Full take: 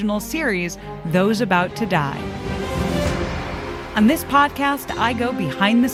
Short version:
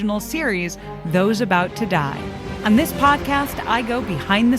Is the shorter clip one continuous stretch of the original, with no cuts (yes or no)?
no